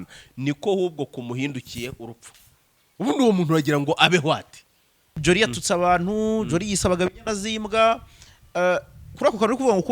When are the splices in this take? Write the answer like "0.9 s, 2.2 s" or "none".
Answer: 5.2 s